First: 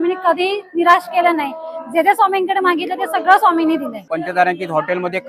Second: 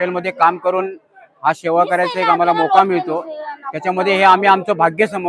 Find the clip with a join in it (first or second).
first